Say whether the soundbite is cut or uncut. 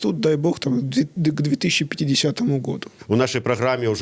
cut